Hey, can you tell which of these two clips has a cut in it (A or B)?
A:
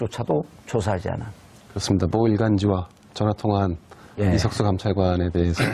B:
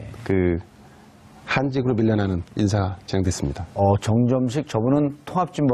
A